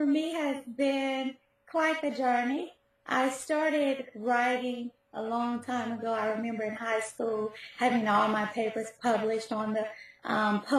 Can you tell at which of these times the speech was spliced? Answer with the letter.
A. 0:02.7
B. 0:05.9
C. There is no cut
B